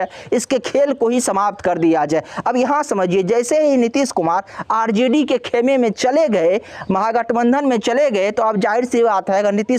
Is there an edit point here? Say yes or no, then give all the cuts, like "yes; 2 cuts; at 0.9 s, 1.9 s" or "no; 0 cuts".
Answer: no; 0 cuts